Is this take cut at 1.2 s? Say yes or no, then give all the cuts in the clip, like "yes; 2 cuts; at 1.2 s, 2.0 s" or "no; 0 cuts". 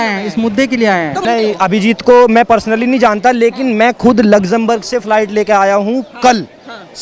yes; 1 cut; at 1.2 s